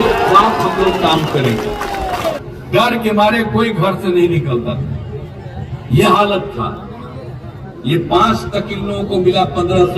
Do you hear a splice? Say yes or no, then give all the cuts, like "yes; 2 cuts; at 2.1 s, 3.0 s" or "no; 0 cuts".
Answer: yes; 1 cut; at 2.4 s